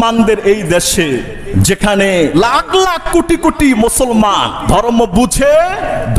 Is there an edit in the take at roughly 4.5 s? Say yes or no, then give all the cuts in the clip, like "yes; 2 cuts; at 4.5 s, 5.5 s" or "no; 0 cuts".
yes; 3 cuts; at 1.4 s, 2.3 s, 4.5 s